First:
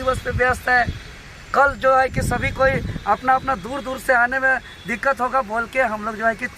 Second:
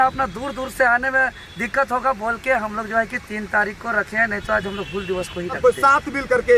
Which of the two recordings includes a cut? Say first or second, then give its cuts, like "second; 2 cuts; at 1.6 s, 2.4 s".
second; 1 cut; at 5.6 s